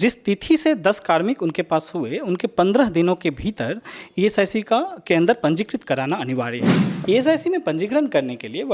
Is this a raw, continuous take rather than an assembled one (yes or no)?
no